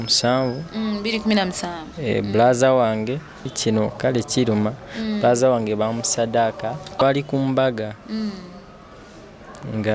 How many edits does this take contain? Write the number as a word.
two